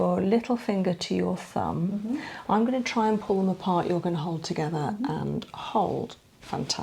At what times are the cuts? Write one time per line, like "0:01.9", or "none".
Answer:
none